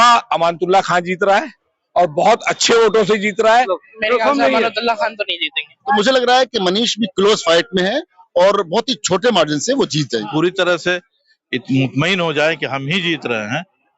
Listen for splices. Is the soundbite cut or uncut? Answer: cut